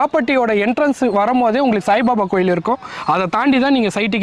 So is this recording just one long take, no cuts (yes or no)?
yes